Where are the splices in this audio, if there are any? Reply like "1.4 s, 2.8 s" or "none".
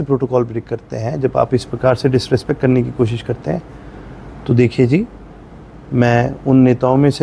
none